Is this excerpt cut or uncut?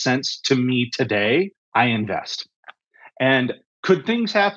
cut